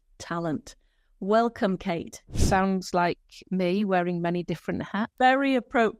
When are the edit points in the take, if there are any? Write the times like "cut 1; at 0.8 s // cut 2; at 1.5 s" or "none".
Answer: cut 1; at 2.4 s // cut 2; at 5.1 s